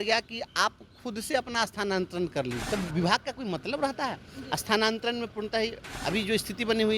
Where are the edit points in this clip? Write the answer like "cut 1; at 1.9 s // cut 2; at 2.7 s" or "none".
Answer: cut 1; at 2.6 s // cut 2; at 5.9 s